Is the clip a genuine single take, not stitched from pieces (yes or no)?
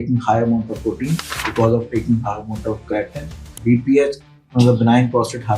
no